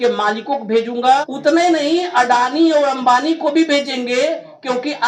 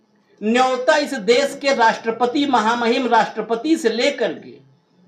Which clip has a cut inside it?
first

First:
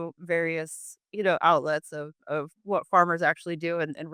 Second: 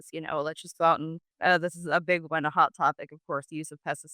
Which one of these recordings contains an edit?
second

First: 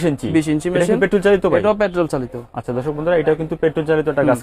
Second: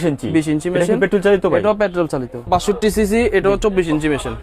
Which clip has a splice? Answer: second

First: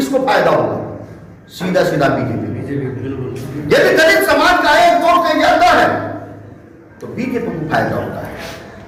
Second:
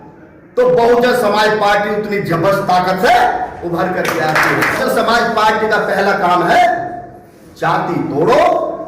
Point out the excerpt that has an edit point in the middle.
second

